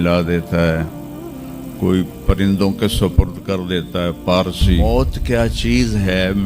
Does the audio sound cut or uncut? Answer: cut